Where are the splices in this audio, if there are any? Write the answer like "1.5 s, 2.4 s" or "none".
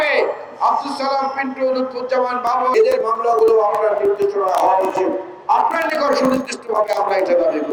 2.7 s